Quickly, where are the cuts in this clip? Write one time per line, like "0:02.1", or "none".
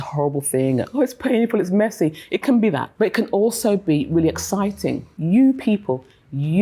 0:02.9
0:05.2